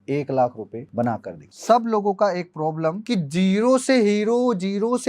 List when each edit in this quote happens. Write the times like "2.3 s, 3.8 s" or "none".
1.2 s, 3.0 s